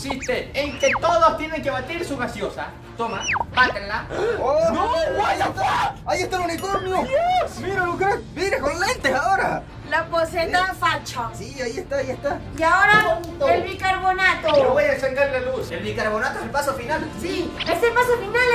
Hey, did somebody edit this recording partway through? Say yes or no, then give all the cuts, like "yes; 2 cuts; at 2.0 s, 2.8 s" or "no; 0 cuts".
yes; 2 cuts; at 4.1 s, 12.5 s